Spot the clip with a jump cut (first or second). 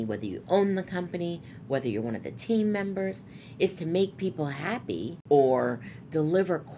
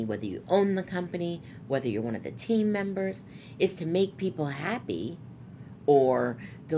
first